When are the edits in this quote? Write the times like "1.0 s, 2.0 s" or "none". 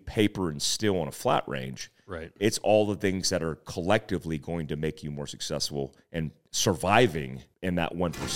6.4 s, 7.4 s